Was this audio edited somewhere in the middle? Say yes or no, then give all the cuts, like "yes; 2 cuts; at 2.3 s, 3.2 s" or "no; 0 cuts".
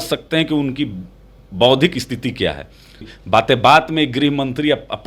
yes; 1 cut; at 3.0 s